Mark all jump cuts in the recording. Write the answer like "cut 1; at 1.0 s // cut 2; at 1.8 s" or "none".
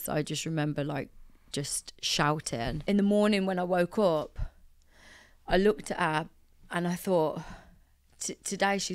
cut 1; at 2.8 s